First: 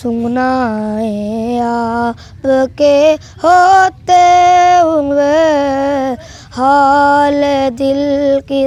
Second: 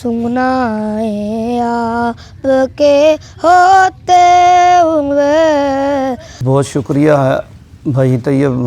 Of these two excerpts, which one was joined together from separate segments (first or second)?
second